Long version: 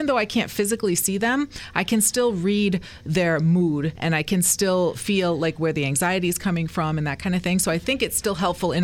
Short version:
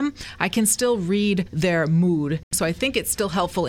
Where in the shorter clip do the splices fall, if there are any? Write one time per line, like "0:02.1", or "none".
0:01.5
0:02.5